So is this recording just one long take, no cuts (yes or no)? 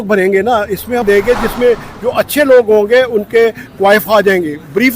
no